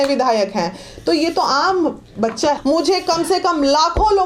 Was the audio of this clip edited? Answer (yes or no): yes